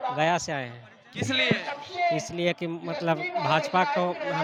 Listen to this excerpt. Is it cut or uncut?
uncut